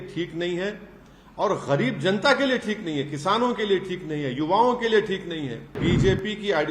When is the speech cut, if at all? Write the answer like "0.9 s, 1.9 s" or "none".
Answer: 5.8 s

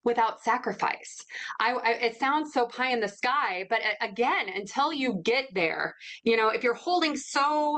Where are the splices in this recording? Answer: none

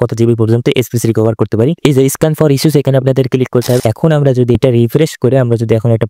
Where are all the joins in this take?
3.8 s

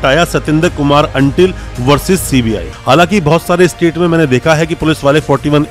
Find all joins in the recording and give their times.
2.7 s

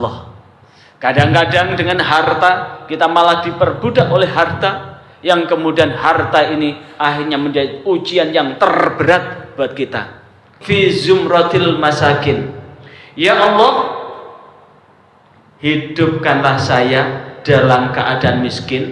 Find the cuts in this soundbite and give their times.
10.5 s

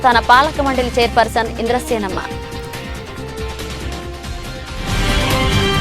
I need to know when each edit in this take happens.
none

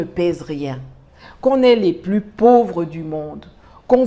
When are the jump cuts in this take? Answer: none

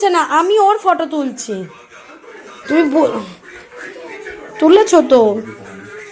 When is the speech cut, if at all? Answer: none

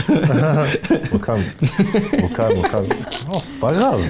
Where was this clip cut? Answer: 3.1 s

